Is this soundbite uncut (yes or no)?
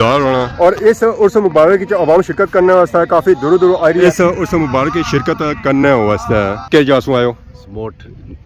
no